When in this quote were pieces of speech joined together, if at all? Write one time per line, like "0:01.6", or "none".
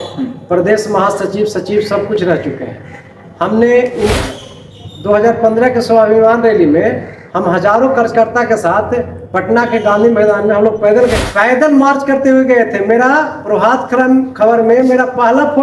0:04.2
0:11.2